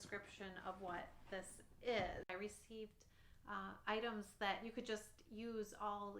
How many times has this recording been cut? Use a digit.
1